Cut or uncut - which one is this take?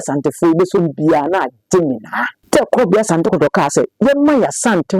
cut